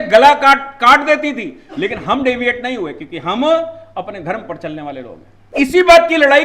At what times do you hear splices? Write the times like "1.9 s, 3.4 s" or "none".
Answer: 5.4 s

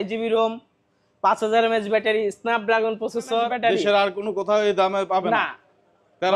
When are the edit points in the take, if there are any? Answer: 3.5 s

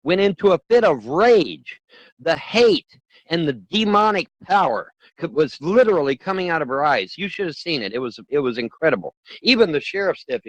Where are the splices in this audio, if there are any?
none

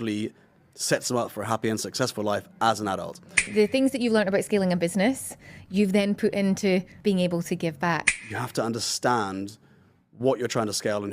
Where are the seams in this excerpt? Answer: 3.5 s, 6.9 s, 8.1 s

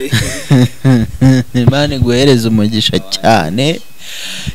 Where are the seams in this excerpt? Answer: none

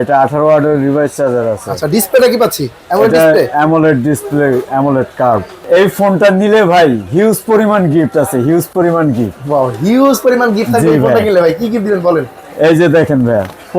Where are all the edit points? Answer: 5.6 s

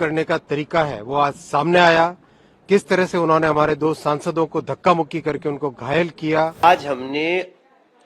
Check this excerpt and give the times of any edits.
6.5 s

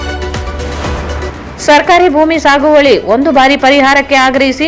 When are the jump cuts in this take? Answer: 1.3 s

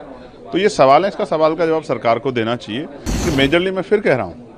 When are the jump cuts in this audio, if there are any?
3.1 s

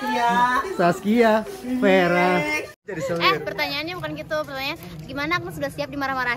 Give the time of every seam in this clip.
2.8 s

